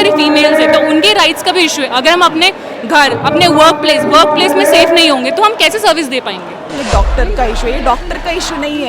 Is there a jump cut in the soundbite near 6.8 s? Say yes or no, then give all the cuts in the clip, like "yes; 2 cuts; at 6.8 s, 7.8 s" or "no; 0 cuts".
yes; 1 cut; at 6.8 s